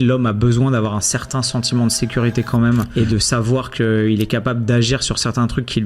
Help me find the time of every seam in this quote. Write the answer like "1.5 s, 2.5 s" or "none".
2.9 s

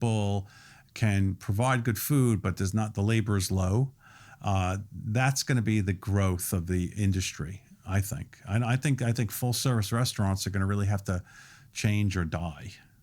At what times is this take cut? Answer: none

